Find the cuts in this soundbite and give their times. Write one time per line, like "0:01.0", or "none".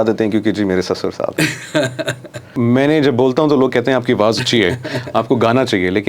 0:02.5

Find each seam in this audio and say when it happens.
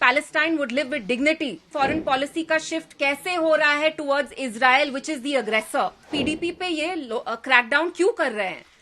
0:01.7
0:06.1

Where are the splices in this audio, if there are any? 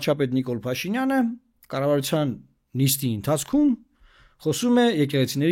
none

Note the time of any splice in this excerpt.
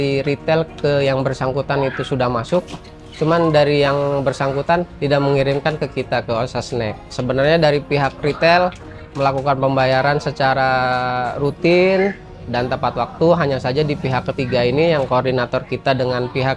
0:04.9
0:07.1

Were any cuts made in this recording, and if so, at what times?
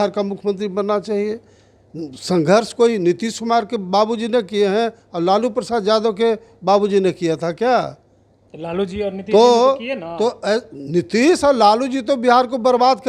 none

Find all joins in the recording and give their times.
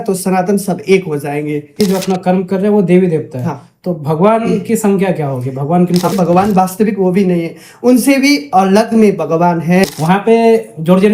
0:01.8
0:06.1
0:09.9

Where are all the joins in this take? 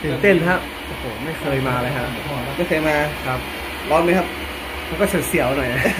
none

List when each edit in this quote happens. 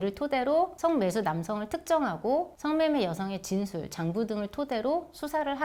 none

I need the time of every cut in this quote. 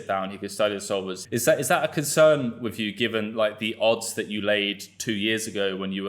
0:01.2

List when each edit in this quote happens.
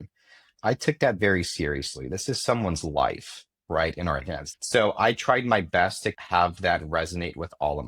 0:04.4

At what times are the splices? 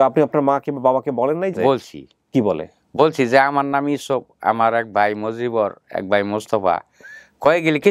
0:01.5

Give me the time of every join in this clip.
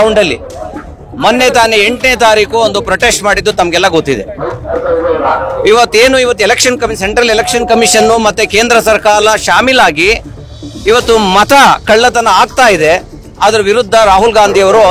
none

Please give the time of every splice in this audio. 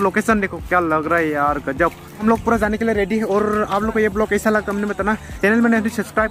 none

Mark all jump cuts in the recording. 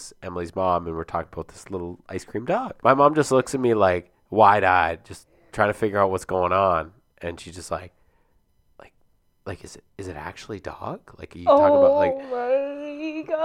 0:02.7

